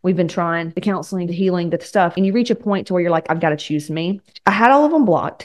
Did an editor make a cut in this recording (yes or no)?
yes